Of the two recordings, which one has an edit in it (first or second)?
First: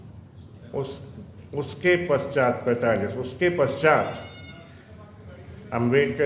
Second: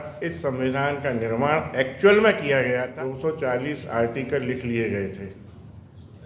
second